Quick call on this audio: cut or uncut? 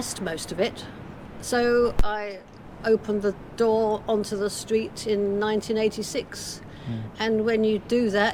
uncut